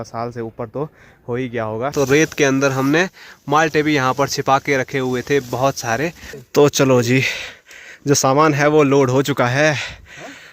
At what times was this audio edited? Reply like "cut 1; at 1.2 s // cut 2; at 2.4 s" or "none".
cut 1; at 1.9 s // cut 2; at 6.3 s